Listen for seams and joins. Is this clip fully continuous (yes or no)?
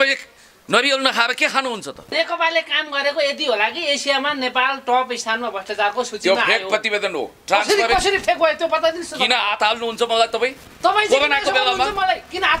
no